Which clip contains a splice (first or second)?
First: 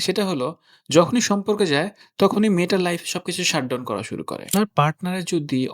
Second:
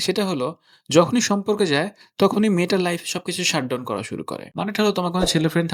first